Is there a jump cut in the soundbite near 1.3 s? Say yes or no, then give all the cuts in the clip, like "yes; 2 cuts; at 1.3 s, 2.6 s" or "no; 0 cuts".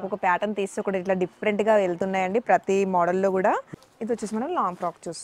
no; 1 cut; at 3.7 s